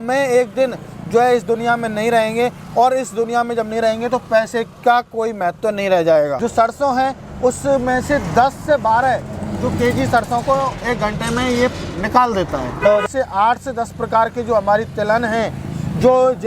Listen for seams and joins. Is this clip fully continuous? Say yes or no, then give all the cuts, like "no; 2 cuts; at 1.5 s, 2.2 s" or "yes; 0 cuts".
no; 2 cuts; at 6.4 s, 13.0 s